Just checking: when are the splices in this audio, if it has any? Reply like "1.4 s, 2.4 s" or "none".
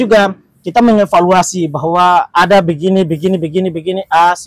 none